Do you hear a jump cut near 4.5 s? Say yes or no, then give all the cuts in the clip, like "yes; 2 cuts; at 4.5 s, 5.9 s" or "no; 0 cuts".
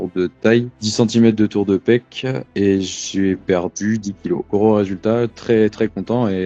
yes; 2 cuts; at 2.4 s, 4.5 s